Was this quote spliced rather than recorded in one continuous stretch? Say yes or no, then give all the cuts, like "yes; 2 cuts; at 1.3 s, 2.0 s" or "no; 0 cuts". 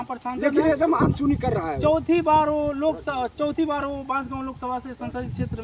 no; 0 cuts